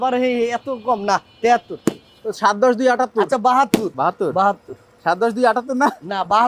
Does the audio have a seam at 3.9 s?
yes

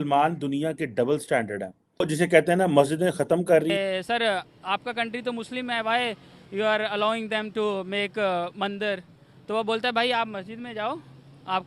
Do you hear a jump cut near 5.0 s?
no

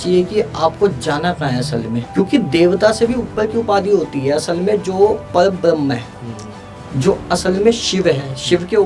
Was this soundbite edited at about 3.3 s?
no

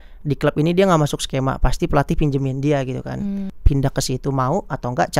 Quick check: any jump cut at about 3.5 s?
yes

